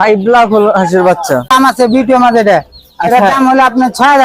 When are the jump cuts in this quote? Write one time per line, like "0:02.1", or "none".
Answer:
0:01.5